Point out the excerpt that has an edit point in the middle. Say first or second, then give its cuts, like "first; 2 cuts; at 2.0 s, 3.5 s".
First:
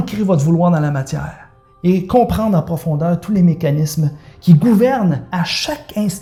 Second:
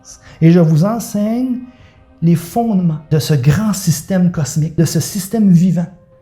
second; 2 cuts; at 3.0 s, 4.7 s